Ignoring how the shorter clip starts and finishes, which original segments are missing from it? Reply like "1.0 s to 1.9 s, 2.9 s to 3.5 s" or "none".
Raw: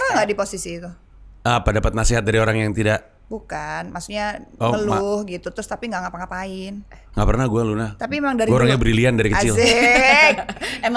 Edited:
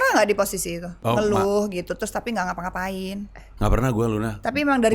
0.9 s to 4.5 s